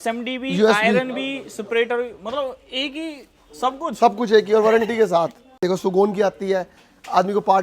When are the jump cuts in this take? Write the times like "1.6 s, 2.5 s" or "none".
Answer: 5.6 s